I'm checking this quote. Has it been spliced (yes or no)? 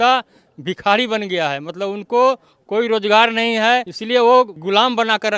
yes